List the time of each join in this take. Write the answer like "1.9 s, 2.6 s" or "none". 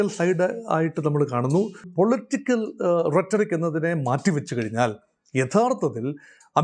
1.9 s